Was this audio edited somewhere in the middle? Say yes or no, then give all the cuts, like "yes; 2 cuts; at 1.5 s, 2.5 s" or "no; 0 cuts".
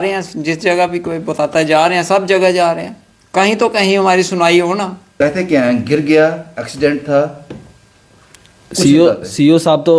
yes; 1 cut; at 5.2 s